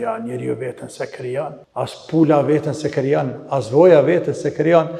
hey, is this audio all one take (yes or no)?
no